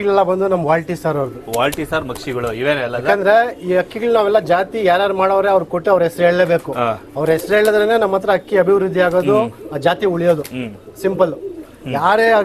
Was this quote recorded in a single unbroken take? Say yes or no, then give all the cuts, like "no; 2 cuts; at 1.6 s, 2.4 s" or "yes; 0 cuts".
yes; 0 cuts